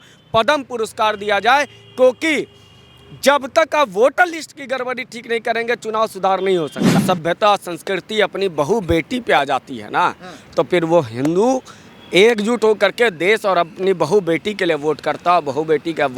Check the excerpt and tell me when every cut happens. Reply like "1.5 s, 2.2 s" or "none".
7.0 s